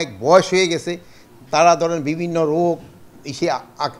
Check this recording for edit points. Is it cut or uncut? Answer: uncut